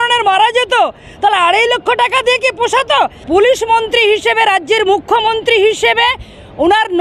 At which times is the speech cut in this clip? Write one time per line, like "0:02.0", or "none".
0:03.2

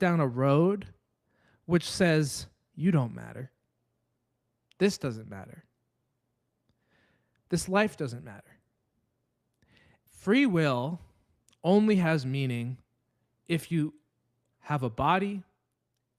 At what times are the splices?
0:10.1
0:14.5

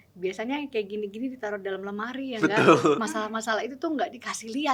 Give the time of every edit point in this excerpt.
none

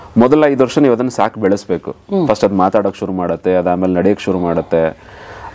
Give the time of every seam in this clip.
none

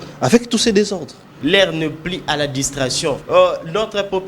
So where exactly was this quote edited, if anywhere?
0:01.3
0:03.2

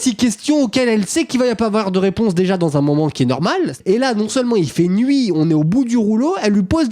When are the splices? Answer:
0:03.8

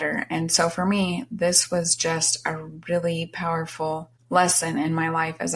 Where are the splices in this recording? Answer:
0:04.1

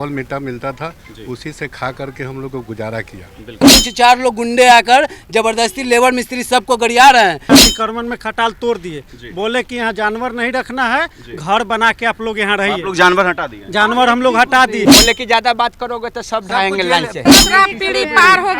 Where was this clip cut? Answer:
0:03.8
0:07.5
0:14.8
0:17.3

